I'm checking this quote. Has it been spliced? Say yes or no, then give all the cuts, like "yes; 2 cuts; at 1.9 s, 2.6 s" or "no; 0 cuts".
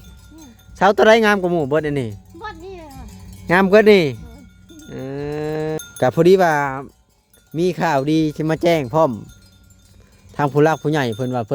yes; 1 cut; at 5.8 s